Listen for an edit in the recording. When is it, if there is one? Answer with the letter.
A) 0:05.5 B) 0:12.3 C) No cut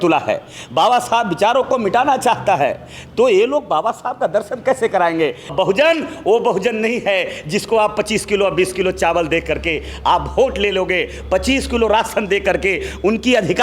A